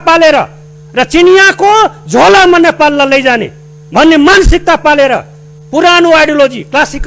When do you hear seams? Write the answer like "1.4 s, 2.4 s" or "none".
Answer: none